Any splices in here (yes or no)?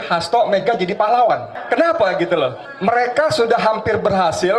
yes